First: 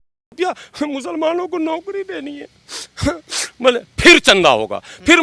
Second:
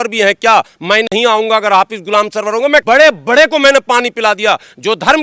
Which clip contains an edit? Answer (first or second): second